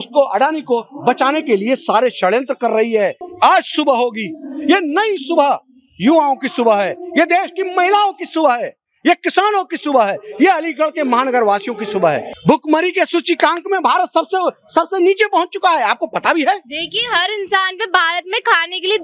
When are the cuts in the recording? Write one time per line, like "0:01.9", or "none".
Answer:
0:03.2
0:12.3